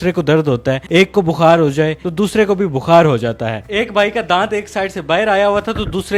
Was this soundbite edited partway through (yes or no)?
no